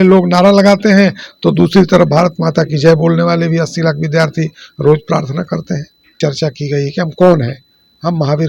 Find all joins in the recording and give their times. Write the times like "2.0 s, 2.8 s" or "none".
6.2 s